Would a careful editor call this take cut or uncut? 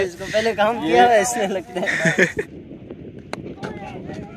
cut